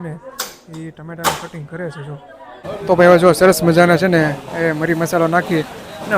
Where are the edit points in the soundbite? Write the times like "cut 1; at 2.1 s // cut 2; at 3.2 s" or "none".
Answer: cut 1; at 2.6 s